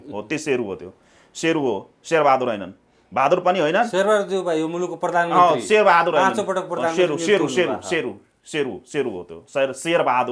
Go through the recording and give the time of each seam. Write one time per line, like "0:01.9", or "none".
none